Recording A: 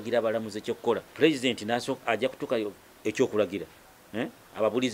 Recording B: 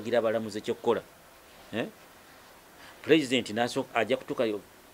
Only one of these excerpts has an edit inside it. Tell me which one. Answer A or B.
A